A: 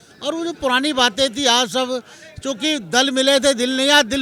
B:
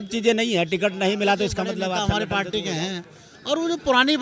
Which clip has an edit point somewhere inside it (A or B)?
B